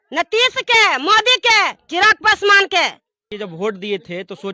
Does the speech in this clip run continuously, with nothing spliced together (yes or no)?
no